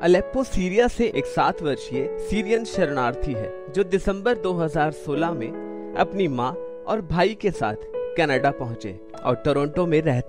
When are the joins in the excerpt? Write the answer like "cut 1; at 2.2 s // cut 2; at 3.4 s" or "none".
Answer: none